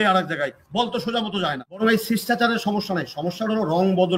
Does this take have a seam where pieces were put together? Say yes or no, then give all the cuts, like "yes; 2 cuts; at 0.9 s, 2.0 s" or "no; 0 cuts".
yes; 1 cut; at 1.8 s